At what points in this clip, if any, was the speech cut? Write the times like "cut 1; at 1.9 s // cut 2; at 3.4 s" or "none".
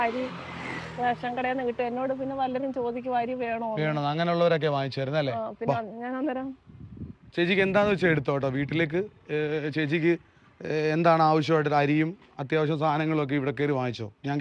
none